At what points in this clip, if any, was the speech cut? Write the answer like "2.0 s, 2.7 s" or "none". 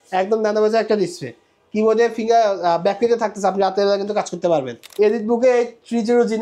4.8 s